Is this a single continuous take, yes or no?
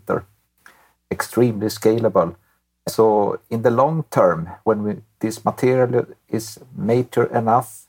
no